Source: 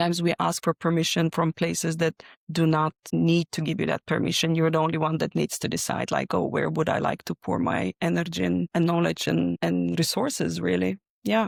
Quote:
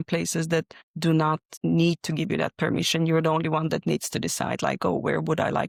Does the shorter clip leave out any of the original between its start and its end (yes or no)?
no